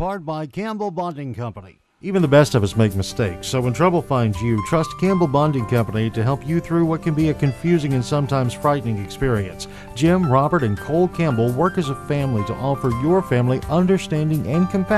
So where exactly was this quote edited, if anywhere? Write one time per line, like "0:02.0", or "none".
0:02.1